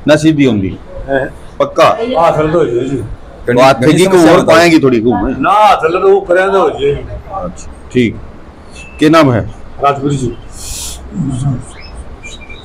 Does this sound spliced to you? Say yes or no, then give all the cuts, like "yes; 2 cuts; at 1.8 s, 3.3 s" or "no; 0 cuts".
no; 0 cuts